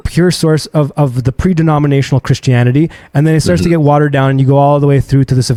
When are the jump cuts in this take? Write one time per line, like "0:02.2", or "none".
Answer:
none